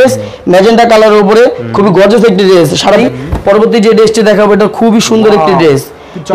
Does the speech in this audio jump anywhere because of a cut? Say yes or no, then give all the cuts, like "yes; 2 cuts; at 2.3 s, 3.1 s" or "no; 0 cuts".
yes; 1 cut; at 3.0 s